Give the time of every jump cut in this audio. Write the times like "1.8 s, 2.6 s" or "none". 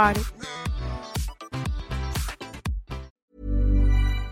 3.1 s